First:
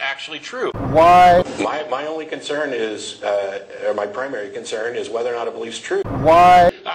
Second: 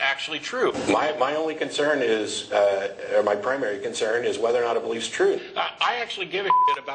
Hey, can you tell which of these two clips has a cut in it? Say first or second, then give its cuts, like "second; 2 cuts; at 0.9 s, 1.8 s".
second; 2 cuts; at 0.8 s, 5.5 s